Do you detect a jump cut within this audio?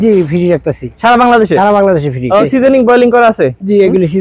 yes; 1 cut; at 2.4 s

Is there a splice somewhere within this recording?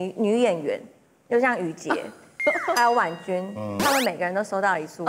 no; 0 cuts

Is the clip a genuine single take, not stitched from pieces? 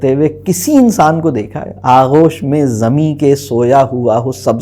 yes; 0 cuts

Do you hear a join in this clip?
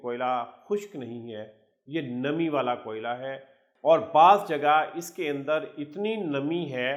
no; 0 cuts

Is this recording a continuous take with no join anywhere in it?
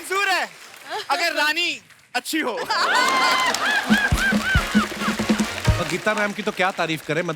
no; 1 cut; at 5.8 s

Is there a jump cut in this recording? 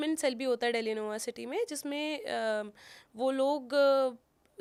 no; 0 cuts

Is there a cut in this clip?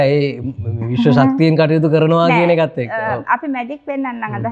no; 0 cuts

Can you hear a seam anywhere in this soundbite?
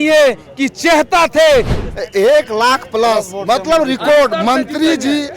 yes; 1 cut; at 1.8 s

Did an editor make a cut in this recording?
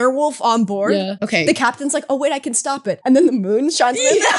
yes; 2 cuts; at 1.2 s, 3.0 s

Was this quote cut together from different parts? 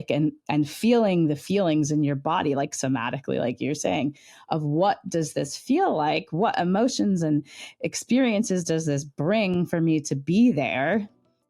no; 0 cuts

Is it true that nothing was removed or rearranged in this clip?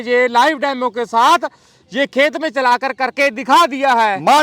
yes; 0 cuts

